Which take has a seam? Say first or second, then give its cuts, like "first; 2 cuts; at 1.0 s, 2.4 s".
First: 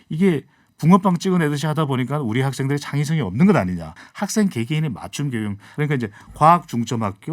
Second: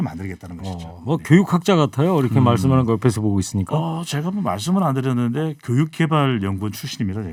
first; 2 cuts; at 4.0 s, 5.7 s